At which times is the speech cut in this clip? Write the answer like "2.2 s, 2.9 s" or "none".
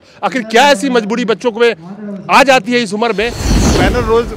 3.5 s